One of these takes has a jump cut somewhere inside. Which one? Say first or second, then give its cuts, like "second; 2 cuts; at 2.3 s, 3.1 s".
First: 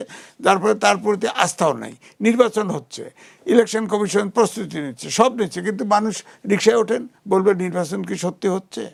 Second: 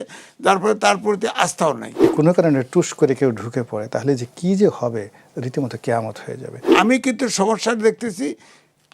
second; 2 cuts; at 2.0 s, 6.7 s